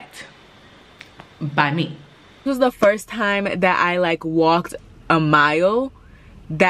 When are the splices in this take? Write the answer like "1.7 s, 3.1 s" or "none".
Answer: 2.4 s